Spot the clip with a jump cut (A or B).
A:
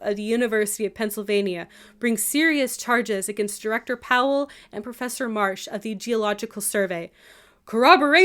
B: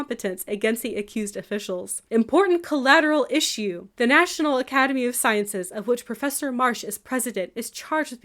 B